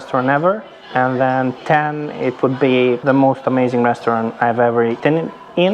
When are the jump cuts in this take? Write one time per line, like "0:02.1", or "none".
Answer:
0:03.0
0:05.0